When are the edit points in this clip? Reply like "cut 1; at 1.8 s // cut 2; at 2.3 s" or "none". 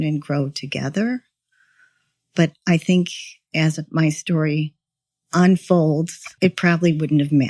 cut 1; at 6.3 s